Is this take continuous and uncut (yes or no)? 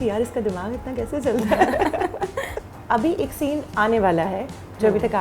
no